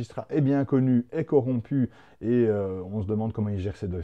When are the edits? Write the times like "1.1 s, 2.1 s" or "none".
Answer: none